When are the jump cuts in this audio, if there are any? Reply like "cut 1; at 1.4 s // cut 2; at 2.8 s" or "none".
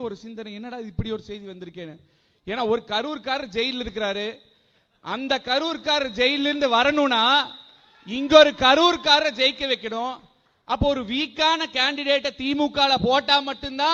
none